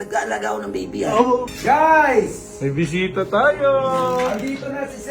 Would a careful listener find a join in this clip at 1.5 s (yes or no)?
yes